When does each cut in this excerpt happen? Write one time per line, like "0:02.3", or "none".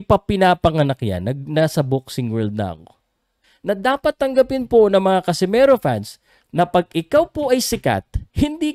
0:03.5